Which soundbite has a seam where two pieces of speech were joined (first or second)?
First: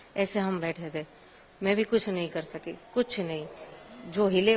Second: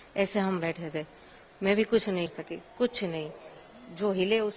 second